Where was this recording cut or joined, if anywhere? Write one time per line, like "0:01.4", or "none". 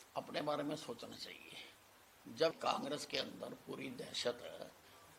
0:02.5